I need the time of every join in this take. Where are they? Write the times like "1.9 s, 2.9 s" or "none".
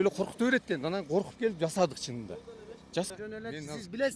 3.1 s